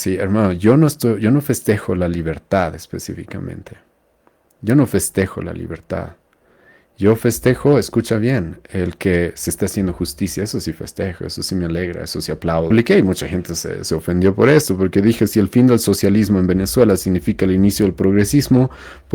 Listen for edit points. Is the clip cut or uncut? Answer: cut